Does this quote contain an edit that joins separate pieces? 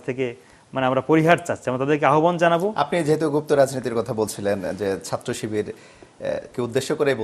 no; 0 cuts

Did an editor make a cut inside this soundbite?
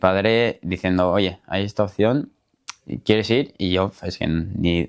no; 0 cuts

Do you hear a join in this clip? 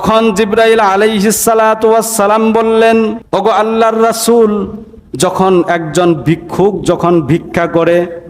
yes; 1 cut; at 3.2 s

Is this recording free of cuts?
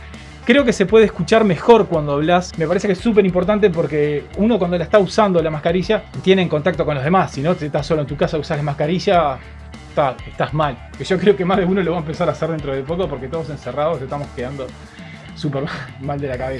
yes; 0 cuts

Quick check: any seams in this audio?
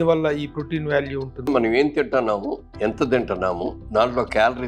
yes; 3 cuts; at 1.5 s, 2.6 s, 3.8 s

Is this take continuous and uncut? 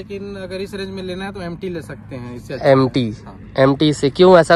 yes; 0 cuts

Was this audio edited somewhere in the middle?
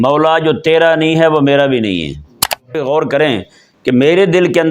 yes; 1 cut; at 2.7 s

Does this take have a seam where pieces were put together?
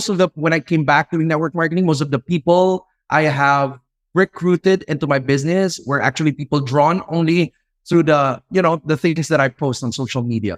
no; 0 cuts

